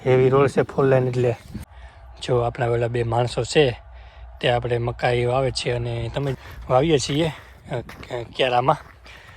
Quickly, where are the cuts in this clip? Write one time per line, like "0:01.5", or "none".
0:02.1
0:06.3